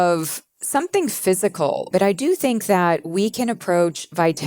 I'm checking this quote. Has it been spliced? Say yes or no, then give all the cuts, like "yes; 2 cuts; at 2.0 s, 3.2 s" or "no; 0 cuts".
yes; 1 cut; at 1.9 s